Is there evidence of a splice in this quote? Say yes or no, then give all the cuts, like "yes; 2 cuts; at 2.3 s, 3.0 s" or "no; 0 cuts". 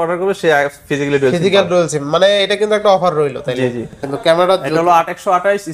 yes; 1 cut; at 4.1 s